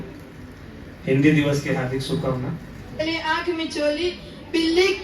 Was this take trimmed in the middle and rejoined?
yes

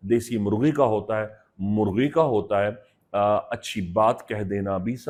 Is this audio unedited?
yes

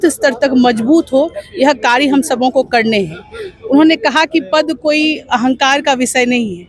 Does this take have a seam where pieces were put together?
no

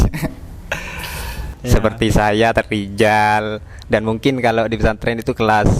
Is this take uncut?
no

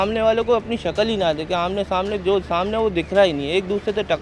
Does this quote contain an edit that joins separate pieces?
no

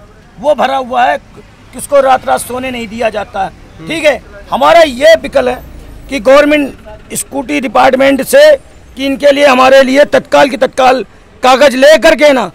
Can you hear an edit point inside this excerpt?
no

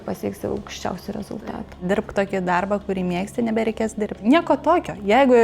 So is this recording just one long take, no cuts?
no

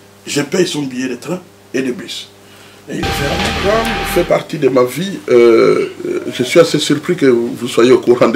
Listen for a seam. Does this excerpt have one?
yes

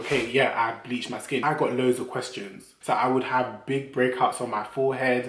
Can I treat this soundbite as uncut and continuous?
no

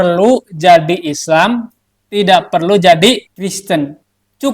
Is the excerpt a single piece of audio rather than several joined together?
no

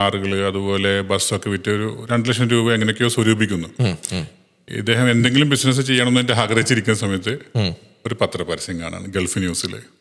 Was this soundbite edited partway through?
no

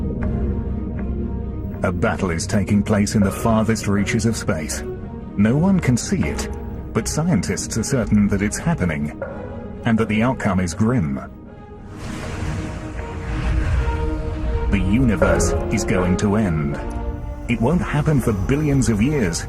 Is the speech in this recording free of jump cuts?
no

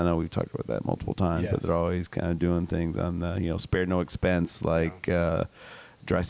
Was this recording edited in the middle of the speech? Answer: no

